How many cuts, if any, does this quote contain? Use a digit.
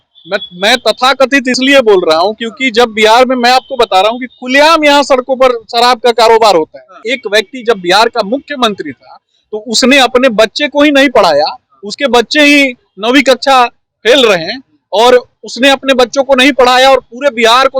1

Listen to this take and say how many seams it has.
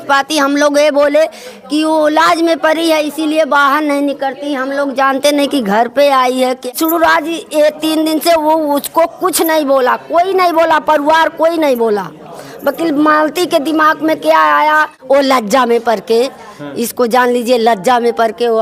2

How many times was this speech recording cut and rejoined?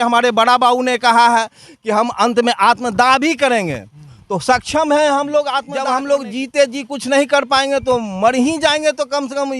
1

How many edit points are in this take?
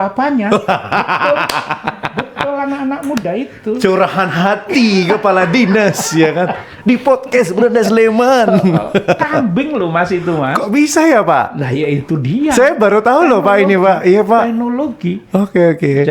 0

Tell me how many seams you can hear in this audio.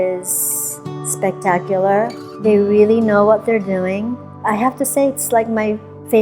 2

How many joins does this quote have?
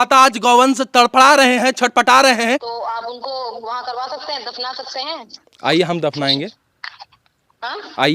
1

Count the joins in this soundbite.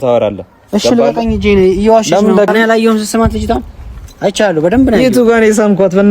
1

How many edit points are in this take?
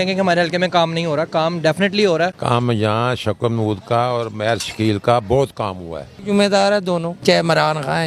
3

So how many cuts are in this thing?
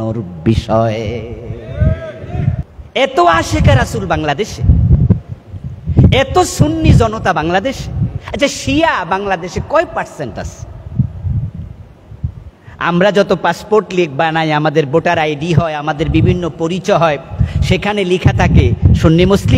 1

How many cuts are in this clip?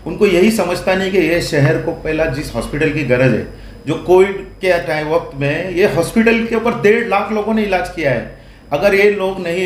0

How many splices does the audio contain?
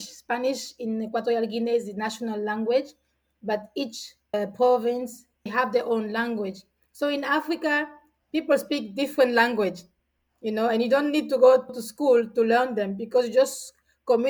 1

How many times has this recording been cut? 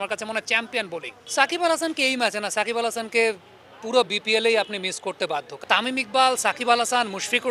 2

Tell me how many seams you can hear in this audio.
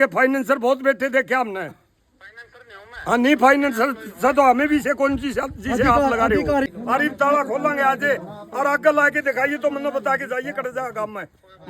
1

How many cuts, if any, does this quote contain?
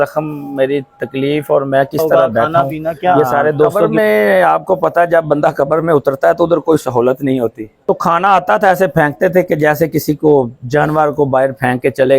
2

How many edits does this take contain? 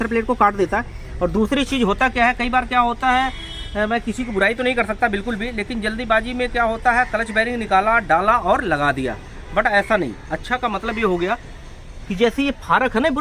0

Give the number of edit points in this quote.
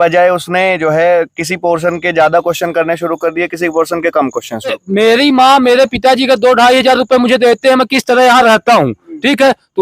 1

